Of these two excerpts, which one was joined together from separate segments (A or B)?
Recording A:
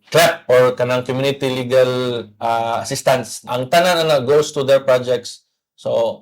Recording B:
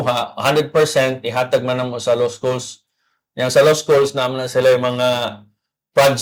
A